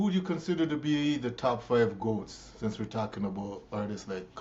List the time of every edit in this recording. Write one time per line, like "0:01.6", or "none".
none